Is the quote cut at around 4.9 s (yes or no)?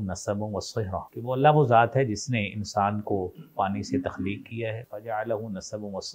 yes